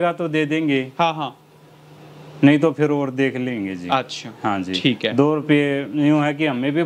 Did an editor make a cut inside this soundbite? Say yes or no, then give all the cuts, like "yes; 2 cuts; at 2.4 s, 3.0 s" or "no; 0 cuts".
no; 0 cuts